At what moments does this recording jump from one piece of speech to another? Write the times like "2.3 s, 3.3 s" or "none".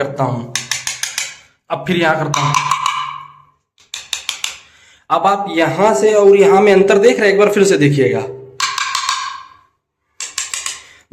none